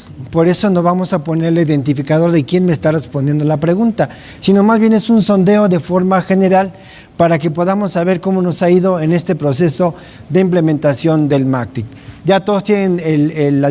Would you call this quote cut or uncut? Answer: uncut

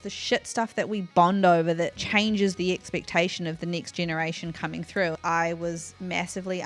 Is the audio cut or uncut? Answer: cut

